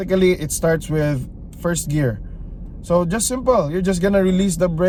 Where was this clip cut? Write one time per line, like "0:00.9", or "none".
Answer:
none